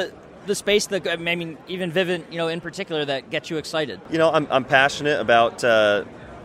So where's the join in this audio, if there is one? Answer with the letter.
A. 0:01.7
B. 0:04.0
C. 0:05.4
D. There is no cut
B